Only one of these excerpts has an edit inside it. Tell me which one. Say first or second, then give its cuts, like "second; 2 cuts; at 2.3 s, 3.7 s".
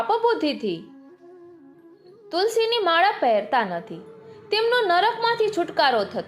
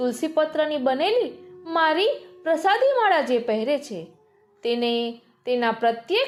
first; 2 cuts; at 0.9 s, 2.3 s